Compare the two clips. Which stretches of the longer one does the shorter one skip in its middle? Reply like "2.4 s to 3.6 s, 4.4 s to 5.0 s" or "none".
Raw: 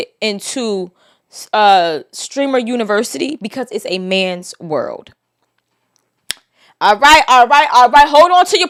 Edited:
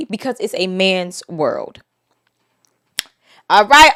none